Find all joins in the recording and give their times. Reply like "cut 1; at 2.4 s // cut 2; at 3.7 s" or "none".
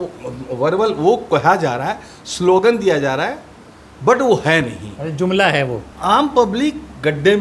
cut 1; at 5.9 s